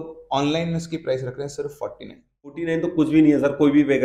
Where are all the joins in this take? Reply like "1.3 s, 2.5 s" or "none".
2.6 s